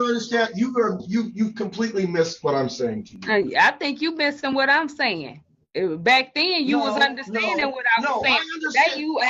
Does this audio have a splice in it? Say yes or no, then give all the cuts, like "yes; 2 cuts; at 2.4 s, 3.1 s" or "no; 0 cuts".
no; 0 cuts